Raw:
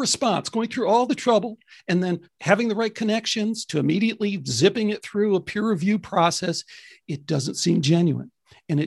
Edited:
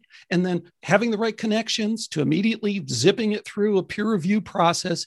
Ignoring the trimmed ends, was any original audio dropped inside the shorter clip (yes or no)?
no